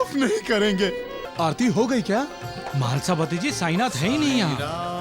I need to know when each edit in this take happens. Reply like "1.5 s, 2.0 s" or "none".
1.2 s